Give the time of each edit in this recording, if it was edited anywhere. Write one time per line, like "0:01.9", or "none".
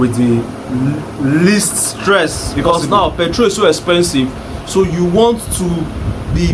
0:02.5